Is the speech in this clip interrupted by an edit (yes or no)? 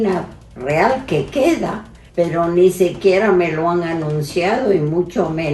yes